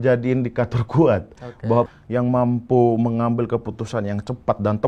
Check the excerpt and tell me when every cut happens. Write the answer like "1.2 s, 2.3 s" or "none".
1.9 s